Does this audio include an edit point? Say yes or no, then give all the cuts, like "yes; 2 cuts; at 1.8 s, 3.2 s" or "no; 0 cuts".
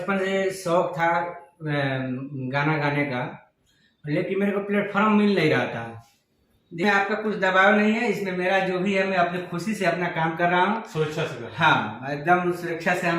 yes; 1 cut; at 6.8 s